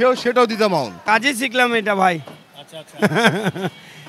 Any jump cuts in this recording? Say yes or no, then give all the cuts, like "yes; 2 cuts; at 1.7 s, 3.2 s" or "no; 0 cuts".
yes; 1 cut; at 1.0 s